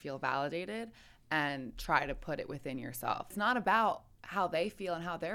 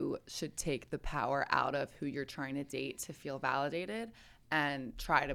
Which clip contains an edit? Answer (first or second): first